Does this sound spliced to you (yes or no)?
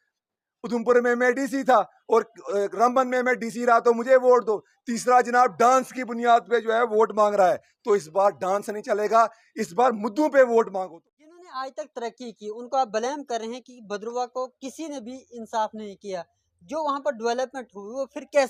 yes